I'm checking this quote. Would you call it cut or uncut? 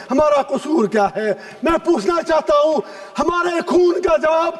uncut